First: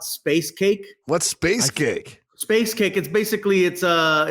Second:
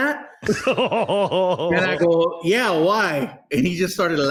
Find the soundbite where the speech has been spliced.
first; 1 cut; at 0.9 s

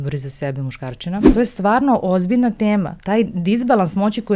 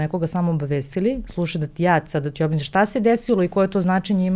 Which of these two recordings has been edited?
first; 2 cuts; at 1.3 s, 3.0 s

